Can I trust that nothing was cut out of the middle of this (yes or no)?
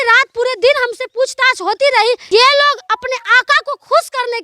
no